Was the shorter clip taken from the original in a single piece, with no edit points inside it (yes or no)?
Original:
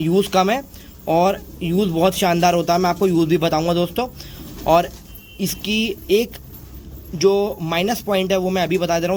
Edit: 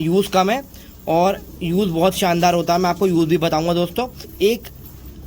no